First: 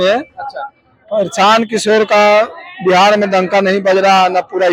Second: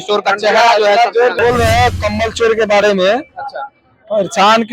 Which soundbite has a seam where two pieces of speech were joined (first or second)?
second